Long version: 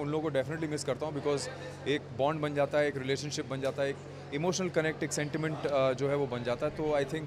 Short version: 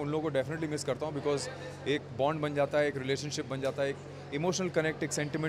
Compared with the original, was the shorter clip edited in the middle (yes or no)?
no